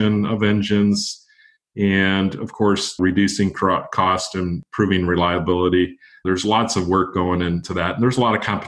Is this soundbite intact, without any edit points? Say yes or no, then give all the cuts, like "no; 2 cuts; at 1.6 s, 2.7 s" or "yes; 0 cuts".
no; 4 cuts; at 3.0 s, 4.6 s, 6.1 s, 7.6 s